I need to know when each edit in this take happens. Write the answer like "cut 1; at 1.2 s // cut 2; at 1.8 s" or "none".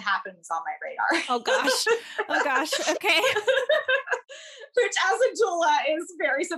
none